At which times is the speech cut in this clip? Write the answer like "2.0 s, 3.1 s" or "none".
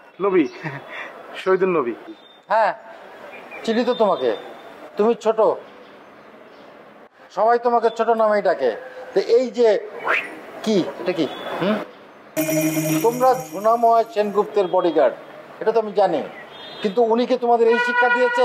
12.4 s